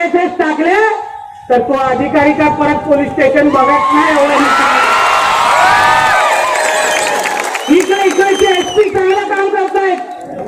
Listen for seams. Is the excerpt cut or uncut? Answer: uncut